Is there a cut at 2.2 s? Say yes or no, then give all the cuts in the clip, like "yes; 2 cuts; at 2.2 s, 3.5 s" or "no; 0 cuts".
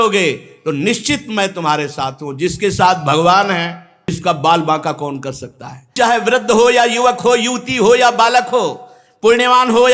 no; 2 cuts; at 4.2 s, 5.9 s